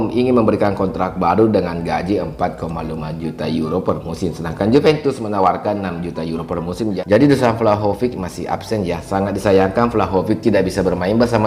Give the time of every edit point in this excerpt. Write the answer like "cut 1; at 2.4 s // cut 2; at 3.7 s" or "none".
cut 1; at 6.9 s